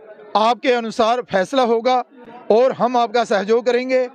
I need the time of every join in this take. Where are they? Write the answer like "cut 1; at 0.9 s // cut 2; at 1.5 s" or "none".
cut 1; at 1.9 s